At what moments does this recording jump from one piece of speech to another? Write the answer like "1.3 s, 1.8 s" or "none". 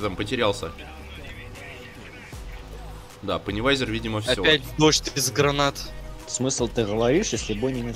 none